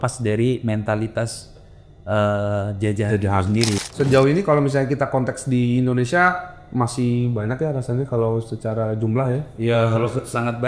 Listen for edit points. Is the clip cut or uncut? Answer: cut